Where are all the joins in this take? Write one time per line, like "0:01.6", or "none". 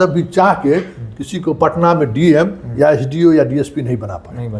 none